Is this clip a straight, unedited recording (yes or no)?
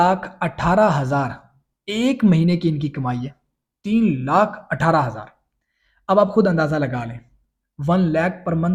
yes